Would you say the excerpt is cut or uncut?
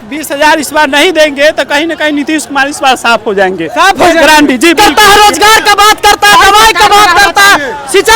cut